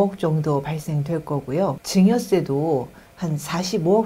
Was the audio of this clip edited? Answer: yes; 1 cut; at 1.8 s

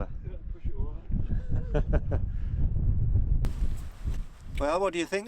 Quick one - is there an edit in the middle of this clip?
yes; 1 cut; at 3.4 s

